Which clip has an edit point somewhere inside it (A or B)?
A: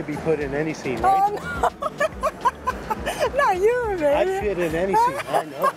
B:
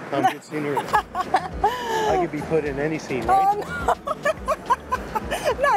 B